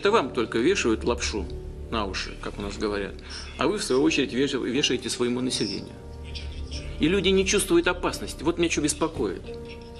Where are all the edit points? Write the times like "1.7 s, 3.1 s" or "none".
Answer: none